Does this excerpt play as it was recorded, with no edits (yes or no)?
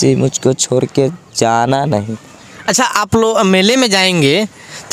yes